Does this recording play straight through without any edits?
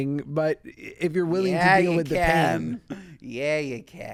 yes; 0 cuts

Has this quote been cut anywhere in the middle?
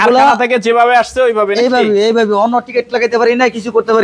no; 0 cuts

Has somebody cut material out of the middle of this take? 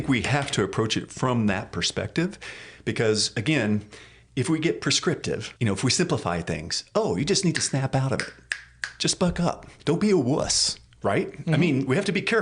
yes; 2 cuts; at 5.5 s, 9.7 s

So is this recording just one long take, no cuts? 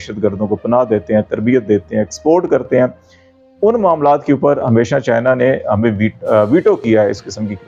yes; 0 cuts

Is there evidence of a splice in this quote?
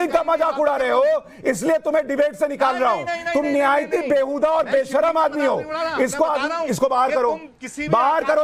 no; 0 cuts

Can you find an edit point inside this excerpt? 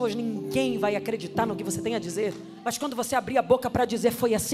yes; 1 cut; at 2.5 s

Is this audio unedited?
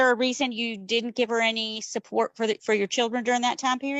yes; 0 cuts

